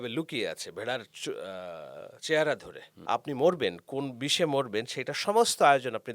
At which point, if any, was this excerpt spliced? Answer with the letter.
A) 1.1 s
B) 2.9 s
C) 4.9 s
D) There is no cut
B